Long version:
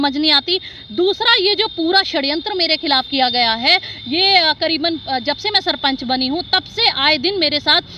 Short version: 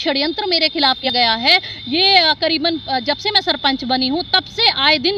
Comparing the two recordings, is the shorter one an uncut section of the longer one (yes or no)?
no